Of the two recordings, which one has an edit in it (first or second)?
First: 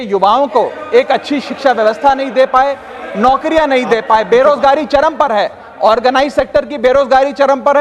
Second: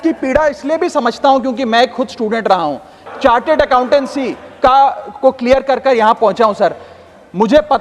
second